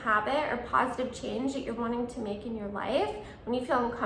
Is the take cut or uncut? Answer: uncut